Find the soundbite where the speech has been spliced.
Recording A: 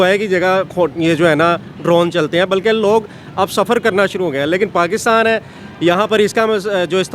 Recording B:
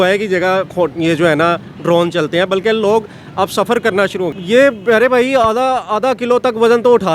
B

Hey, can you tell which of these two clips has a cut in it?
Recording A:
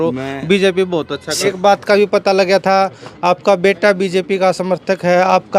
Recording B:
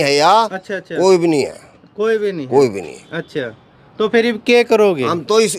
A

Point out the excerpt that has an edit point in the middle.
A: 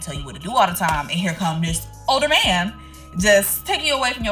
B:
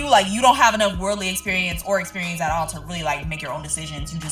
B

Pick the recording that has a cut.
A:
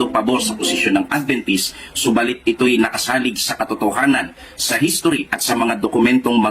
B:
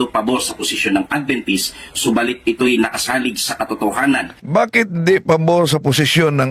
A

